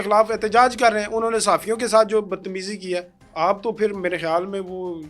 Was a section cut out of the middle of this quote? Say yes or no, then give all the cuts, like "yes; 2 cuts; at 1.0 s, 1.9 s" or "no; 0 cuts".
yes; 1 cut; at 3.2 s